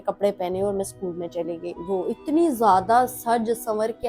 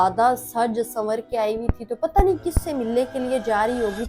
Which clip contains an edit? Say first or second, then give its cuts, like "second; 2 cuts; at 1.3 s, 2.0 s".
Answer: first; 1 cut; at 1.8 s